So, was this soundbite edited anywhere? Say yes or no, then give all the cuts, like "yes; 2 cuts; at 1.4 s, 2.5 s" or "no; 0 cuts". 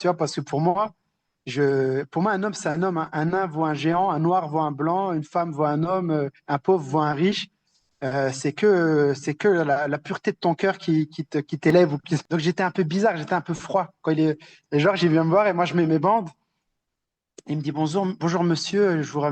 yes; 1 cut; at 12.1 s